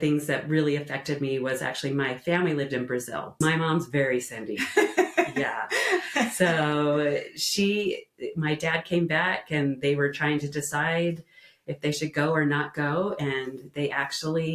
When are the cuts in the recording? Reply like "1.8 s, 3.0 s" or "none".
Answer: 3.3 s

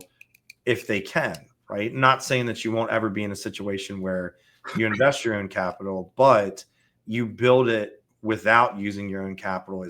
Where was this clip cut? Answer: none

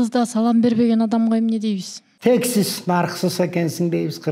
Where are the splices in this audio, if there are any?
none

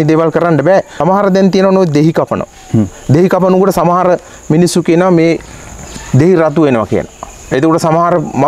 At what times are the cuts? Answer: 0.9 s

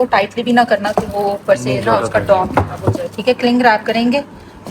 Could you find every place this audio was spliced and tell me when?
none

